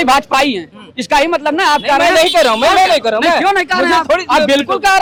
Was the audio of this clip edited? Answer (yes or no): no